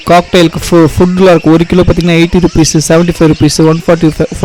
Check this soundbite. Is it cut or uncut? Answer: uncut